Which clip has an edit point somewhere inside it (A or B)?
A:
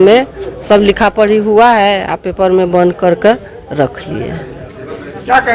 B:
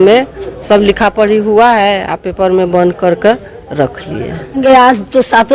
B